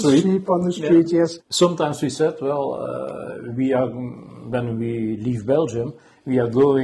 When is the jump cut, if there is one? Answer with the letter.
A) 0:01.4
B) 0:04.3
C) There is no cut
A